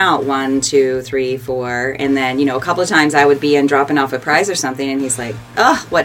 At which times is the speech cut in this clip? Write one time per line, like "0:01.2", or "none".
none